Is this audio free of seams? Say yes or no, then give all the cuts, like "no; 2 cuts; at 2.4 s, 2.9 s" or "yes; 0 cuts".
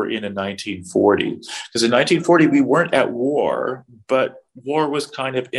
yes; 0 cuts